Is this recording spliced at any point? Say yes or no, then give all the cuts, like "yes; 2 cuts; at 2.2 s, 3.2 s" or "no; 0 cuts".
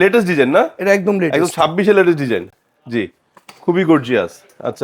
no; 0 cuts